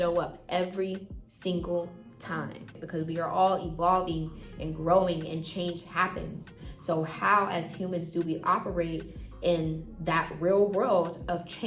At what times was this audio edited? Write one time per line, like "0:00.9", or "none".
0:02.7